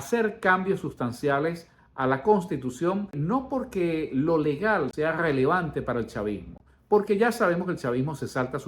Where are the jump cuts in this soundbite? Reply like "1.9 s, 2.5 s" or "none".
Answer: 3.2 s, 4.9 s